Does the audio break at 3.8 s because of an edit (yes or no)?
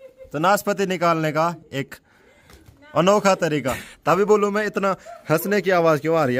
yes